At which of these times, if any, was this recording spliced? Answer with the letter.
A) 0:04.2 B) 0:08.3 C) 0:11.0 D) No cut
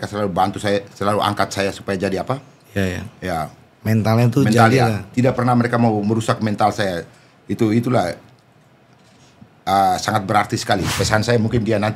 C